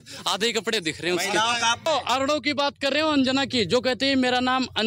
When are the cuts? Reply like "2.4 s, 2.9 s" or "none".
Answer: 1.9 s